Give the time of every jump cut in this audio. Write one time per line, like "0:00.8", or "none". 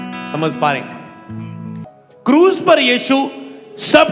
0:01.9